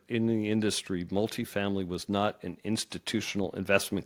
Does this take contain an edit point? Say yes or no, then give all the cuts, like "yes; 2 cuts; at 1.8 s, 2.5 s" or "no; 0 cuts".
no; 0 cuts